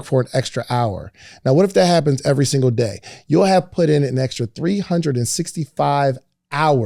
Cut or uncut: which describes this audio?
uncut